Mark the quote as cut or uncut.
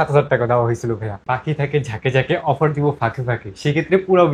cut